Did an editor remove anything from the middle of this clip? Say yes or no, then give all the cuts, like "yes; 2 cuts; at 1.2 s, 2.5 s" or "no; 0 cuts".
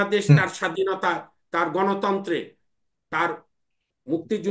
no; 0 cuts